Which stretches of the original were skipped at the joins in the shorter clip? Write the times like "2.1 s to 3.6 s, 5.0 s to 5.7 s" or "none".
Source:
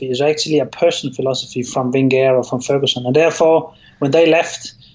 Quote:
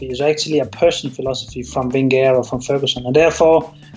none